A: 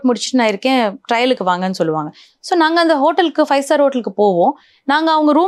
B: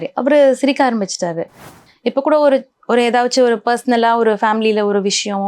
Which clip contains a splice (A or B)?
B